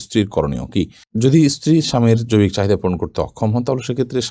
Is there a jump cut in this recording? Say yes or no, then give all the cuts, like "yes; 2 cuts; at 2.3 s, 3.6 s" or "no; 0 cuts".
no; 0 cuts